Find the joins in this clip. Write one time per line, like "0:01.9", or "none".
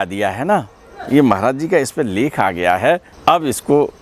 0:03.1